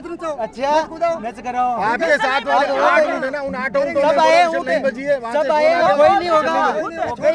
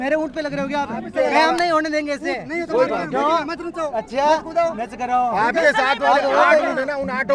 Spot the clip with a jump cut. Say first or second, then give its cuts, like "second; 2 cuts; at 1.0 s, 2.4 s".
second; 1 cut; at 1.1 s